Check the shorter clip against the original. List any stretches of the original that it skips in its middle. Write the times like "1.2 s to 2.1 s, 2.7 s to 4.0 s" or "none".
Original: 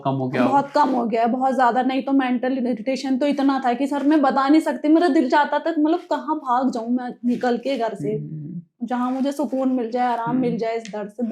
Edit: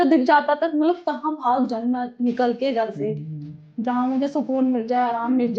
none